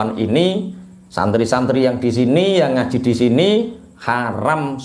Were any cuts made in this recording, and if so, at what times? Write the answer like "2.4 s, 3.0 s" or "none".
none